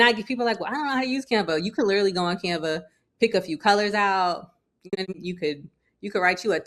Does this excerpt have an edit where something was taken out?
yes; 1 cut; at 4.9 s

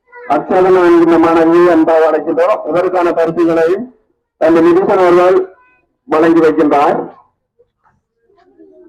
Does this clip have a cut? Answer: no; 0 cuts

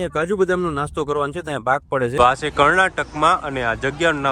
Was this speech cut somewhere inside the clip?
yes; 1 cut; at 2.2 s

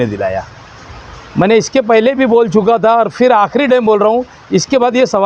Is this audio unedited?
yes; 0 cuts

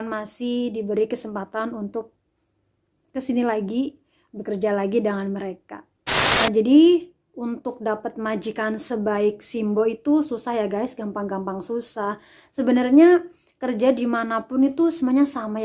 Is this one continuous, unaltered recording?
no; 1 cut; at 6.4 s

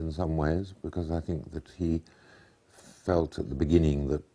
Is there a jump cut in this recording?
no; 0 cuts

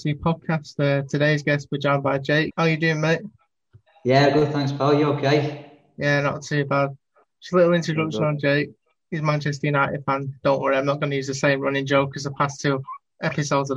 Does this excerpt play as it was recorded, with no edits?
no; 1 cut; at 2.5 s

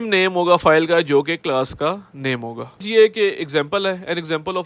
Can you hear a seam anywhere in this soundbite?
yes; 1 cut; at 2.8 s

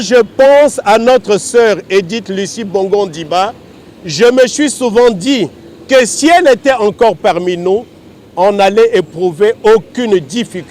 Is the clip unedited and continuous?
yes; 0 cuts

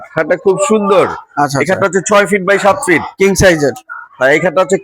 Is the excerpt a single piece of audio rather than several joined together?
yes; 0 cuts

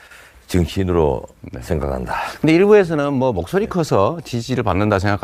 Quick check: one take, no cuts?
no; 1 cut; at 4.3 s

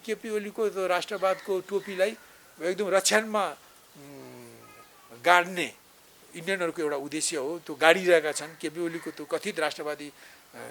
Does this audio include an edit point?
no; 0 cuts

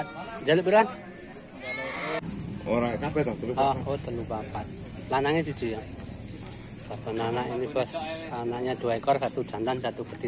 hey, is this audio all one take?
no; 1 cut; at 2.2 s

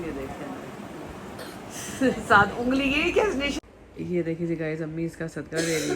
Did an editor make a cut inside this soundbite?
yes; 1 cut; at 3.5 s

